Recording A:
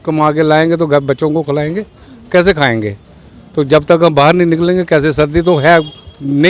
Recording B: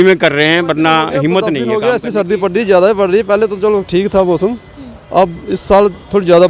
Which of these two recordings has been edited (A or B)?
B